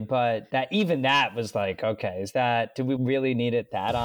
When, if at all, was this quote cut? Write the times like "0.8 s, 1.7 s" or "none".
3.0 s